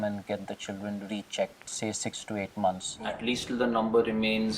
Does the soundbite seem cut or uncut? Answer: cut